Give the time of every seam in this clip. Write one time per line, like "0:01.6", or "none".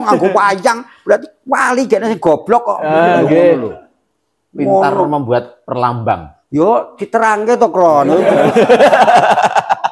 none